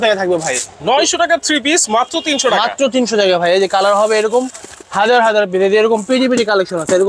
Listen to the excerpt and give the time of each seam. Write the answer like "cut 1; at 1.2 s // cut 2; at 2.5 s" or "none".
none